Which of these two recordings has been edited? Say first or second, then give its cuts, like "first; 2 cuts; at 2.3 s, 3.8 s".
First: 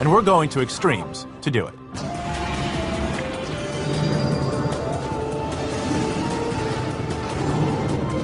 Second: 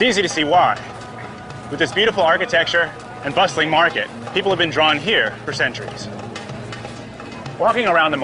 second; 1 cut; at 2.4 s